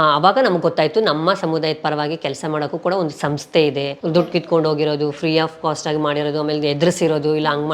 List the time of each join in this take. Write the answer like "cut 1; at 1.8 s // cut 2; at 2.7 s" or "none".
cut 1; at 3.9 s